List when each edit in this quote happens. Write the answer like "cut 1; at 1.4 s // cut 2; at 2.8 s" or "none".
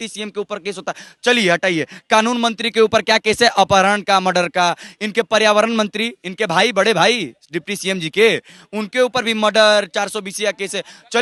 none